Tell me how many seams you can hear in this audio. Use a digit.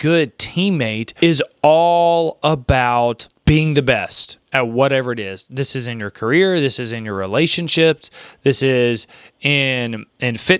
2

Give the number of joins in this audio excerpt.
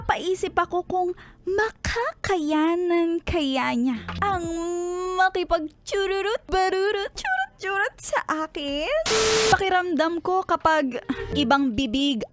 5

